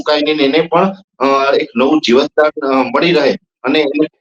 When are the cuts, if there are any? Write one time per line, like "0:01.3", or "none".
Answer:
none

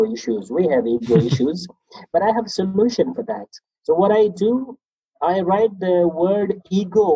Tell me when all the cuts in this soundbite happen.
none

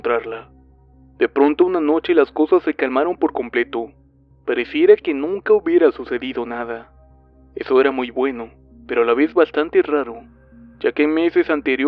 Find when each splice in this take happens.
0:01.7

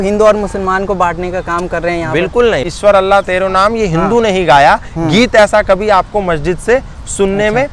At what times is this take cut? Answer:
0:02.7

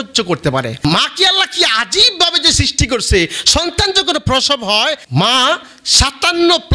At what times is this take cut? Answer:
0:00.8
0:05.0

